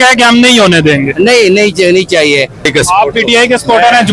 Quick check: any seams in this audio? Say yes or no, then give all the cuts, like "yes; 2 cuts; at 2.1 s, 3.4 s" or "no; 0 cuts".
yes; 1 cut; at 2.7 s